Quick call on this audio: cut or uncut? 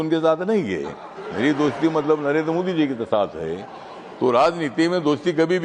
uncut